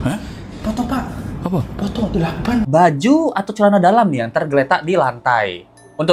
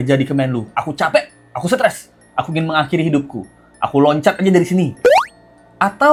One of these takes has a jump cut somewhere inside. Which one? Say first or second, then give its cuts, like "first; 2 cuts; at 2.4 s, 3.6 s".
first; 1 cut; at 2.7 s